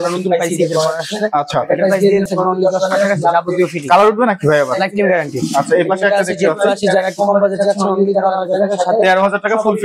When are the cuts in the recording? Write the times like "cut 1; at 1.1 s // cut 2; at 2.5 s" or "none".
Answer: cut 1; at 2.3 s